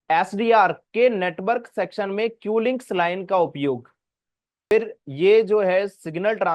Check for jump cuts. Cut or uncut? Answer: cut